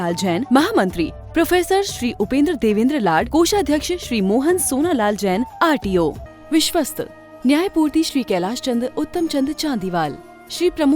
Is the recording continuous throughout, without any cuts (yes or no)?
no